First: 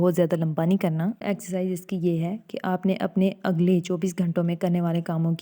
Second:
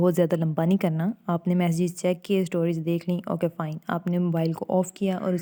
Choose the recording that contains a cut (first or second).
first